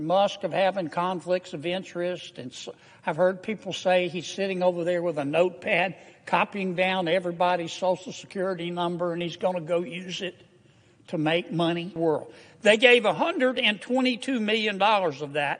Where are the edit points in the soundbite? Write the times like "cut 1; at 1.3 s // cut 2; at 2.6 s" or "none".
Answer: cut 1; at 11.9 s